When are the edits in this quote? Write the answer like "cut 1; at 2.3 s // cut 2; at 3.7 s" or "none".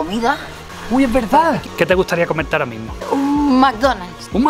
cut 1; at 1.7 s // cut 2; at 2.9 s